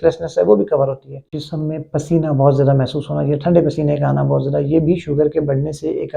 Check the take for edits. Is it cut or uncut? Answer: cut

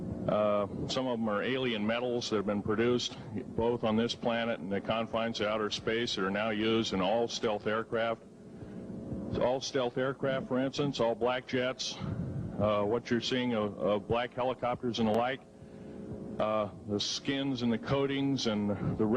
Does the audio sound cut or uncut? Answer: cut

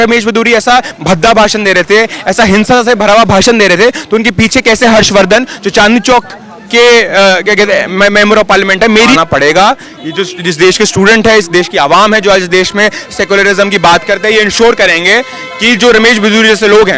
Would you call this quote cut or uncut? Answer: cut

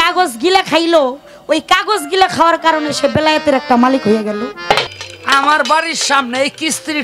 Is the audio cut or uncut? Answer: cut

